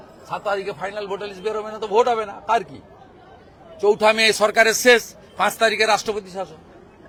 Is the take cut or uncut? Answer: uncut